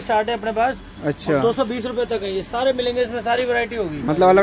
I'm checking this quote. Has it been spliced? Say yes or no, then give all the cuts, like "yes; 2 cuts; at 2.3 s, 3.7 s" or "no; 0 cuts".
no; 0 cuts